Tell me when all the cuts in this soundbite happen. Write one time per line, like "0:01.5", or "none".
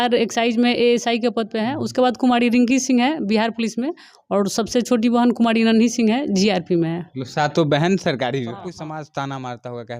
0:08.7